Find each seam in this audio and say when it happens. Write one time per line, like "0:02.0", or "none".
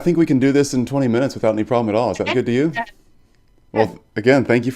0:03.7